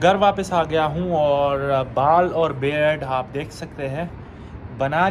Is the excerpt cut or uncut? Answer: uncut